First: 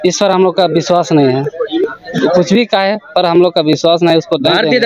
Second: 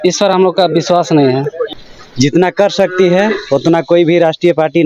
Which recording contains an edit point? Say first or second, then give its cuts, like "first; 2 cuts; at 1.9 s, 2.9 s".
second; 1 cut; at 1.6 s